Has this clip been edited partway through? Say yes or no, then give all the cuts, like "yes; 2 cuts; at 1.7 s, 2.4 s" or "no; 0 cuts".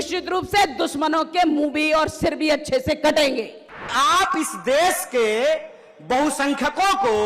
yes; 1 cut; at 3.9 s